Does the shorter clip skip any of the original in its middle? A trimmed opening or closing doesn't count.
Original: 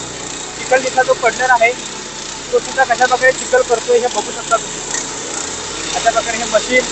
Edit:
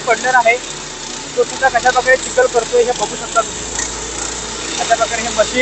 no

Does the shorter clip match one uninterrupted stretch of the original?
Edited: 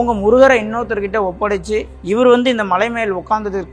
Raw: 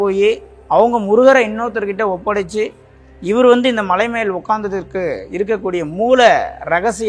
no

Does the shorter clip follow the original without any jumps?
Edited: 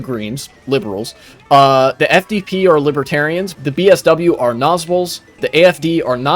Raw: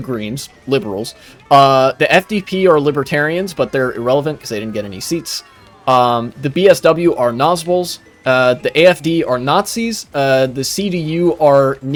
no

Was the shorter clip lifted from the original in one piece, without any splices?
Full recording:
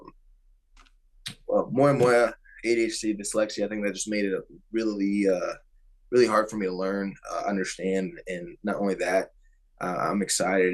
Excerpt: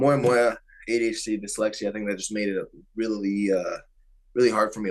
yes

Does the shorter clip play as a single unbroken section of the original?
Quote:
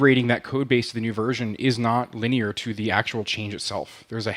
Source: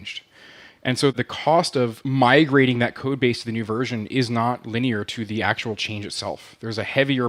yes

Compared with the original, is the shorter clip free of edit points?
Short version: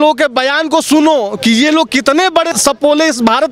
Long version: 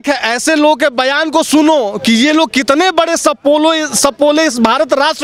no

